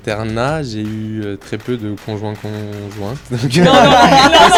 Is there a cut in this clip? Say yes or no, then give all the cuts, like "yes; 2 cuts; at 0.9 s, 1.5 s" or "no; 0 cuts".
no; 0 cuts